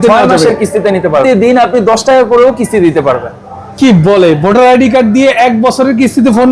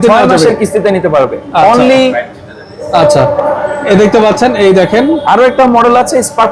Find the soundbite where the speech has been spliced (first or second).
first